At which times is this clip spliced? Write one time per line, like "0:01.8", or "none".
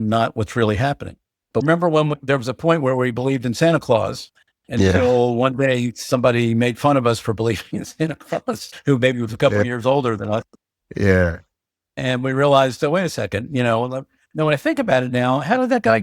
0:01.6